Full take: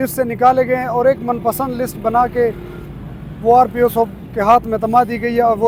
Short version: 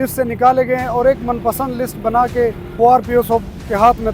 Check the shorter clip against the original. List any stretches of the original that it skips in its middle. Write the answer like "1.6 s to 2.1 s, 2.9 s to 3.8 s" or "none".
2.6 s to 3.3 s